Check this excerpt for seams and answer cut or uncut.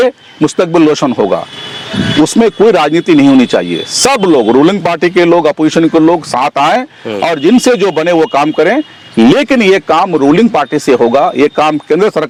uncut